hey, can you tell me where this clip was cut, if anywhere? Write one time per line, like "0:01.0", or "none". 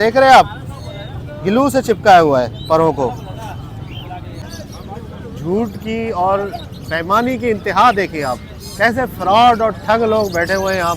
0:04.5